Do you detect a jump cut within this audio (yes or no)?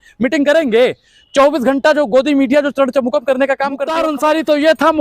yes